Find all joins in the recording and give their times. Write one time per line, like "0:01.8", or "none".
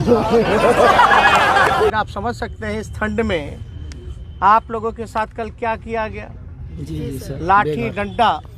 0:01.9